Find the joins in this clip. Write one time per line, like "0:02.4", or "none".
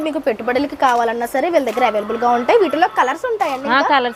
none